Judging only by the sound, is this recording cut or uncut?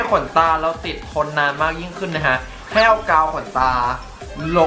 uncut